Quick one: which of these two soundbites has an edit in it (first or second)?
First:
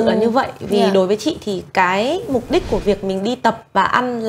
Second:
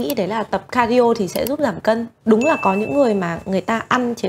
second